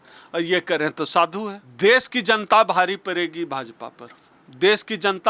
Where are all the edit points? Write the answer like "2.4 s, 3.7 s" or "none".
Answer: 1.6 s